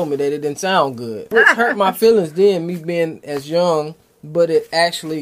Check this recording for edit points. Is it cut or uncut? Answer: cut